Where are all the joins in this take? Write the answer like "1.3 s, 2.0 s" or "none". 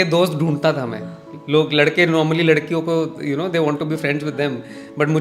none